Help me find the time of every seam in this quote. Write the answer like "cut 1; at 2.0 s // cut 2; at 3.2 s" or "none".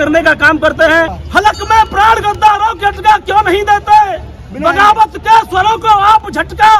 cut 1; at 1.2 s

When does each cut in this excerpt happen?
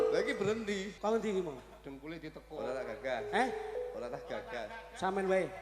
cut 1; at 0.9 s

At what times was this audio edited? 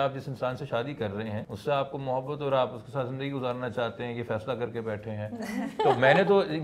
cut 1; at 1.5 s

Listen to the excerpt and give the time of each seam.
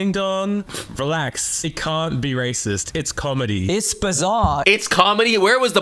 none

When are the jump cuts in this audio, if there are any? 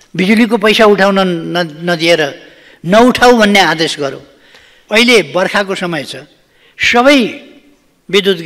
cut 1; at 4.7 s

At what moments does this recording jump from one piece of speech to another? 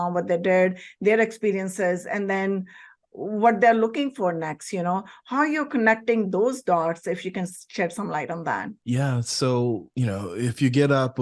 cut 1; at 8.7 s // cut 2; at 9.9 s

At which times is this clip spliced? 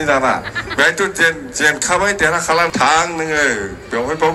cut 1; at 2.7 s

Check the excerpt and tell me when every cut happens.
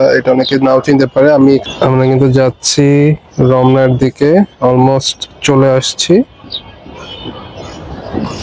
cut 1; at 1.6 s

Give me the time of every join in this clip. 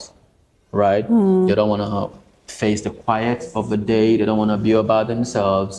none

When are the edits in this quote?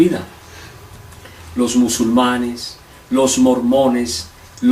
cut 1; at 1.7 s

